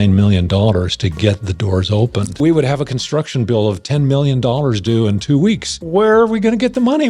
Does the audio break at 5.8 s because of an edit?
yes; 2 cuts; at 2.4 s, 5.8 s

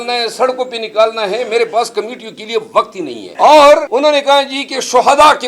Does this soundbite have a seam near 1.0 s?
no; 2 cuts; at 3.2 s, 3.9 s

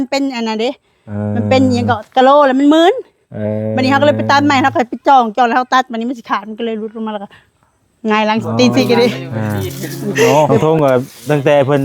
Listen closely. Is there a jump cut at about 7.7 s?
no; 1 cut; at 10.5 s

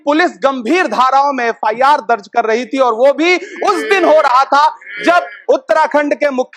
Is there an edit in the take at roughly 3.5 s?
no; 0 cuts

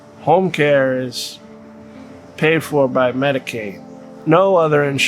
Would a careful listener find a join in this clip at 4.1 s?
yes; 1 cut; at 4.1 s

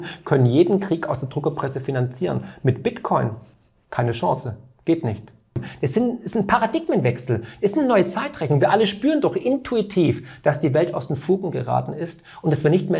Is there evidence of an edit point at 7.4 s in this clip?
no; 1 cut; at 5.7 s

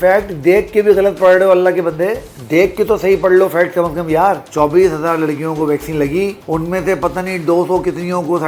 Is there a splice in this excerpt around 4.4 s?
yes; 2 cuts; at 2.3 s, 4.4 s

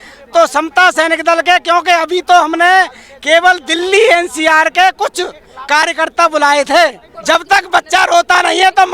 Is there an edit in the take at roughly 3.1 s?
no; 1 cut; at 7.1 s

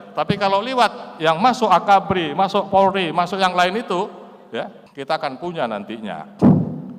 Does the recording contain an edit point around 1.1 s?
no; 1 cut; at 4.9 s

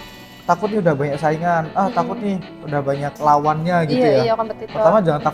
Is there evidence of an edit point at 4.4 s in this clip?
no; 1 cut; at 3.1 s

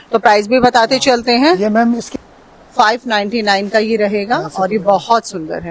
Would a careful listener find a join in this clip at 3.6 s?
no; 1 cut; at 2.0 s

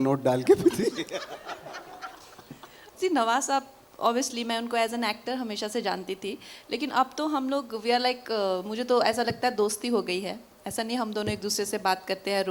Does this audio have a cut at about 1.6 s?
no; 1 cut; at 2.9 s

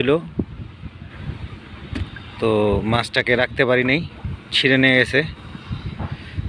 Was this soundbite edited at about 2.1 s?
no; 0 cuts

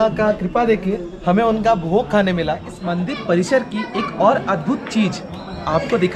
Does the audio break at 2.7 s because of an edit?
yes; 1 cut; at 2.7 s

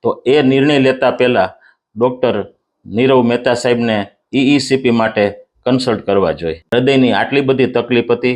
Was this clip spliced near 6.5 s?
yes; 1 cut; at 6.5 s

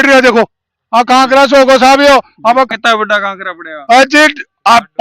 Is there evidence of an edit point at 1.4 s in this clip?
no; 1 cut; at 2.7 s

